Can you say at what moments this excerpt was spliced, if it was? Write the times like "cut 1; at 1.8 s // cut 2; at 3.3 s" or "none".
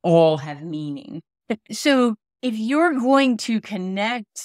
cut 1; at 1.7 s

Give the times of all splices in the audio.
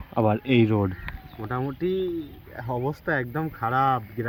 none

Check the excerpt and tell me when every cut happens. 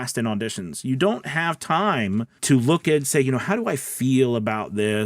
cut 1; at 2.3 s

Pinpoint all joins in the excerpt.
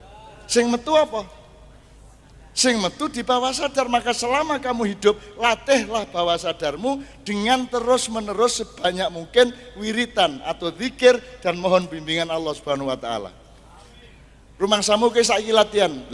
none

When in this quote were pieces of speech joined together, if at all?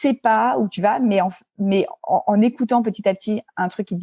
none

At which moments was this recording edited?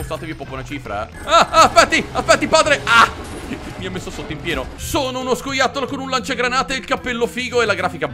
cut 1; at 1.2 s // cut 2; at 4.8 s

